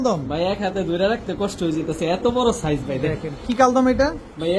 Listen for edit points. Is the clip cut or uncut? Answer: uncut